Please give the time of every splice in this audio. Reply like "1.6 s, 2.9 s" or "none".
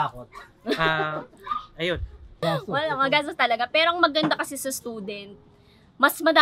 2.2 s